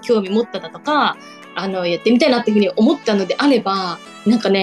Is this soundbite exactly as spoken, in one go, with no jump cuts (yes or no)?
yes